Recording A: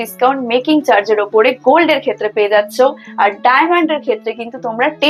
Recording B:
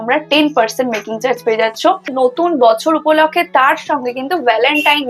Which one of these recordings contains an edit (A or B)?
B